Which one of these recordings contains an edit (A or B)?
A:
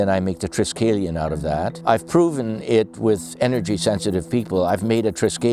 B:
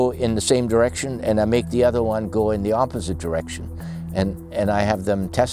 A